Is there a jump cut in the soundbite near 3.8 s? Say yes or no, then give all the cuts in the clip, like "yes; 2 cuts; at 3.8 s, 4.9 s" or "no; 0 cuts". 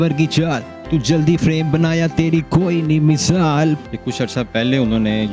yes; 1 cut; at 3.8 s